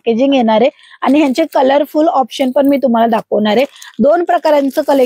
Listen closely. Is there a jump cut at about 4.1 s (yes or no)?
no